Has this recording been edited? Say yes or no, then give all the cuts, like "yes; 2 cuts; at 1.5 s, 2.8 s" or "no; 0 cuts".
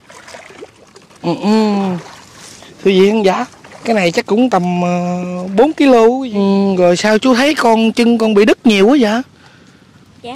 yes; 1 cut; at 6.2 s